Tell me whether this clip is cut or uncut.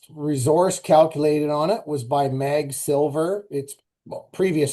uncut